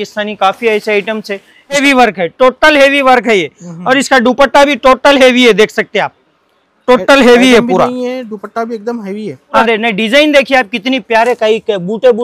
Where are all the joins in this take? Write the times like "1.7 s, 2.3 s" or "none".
1.8 s, 9.5 s